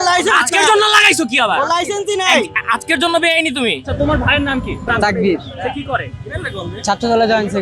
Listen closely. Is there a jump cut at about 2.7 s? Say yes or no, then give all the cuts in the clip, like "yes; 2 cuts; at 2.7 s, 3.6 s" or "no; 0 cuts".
no; 2 cuts; at 3.9 s, 4.8 s